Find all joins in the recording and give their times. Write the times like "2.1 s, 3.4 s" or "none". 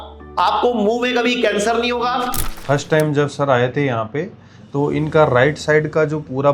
2.5 s